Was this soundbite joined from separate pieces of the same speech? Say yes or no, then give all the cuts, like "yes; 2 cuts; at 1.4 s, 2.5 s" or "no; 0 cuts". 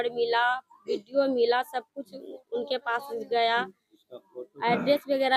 no; 0 cuts